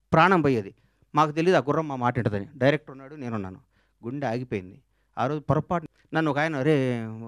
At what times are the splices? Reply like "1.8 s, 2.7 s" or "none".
5.9 s